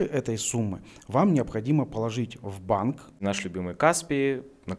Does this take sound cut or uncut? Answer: cut